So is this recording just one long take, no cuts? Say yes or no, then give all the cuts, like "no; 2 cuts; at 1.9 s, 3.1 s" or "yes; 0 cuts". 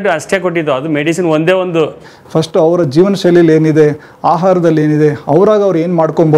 no; 1 cut; at 2.1 s